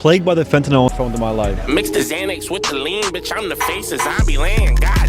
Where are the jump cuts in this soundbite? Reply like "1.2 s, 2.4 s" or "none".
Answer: 0.9 s